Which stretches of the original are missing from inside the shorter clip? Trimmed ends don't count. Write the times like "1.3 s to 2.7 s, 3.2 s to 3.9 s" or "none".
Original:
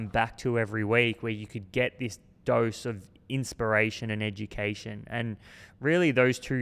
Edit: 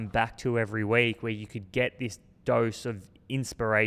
none